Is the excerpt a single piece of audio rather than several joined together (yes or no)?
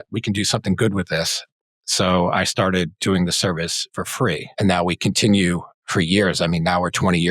no